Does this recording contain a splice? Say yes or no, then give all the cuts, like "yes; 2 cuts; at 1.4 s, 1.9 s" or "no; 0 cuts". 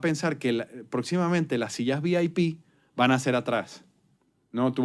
no; 0 cuts